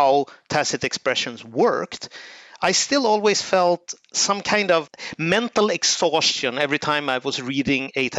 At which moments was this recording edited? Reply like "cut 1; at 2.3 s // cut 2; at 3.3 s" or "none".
none